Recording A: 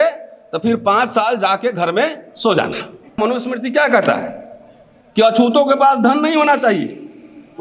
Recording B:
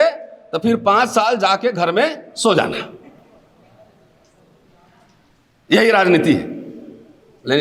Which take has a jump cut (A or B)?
A